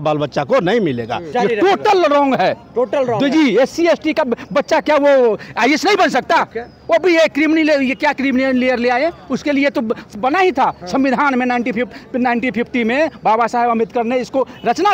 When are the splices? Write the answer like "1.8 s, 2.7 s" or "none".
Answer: 1.2 s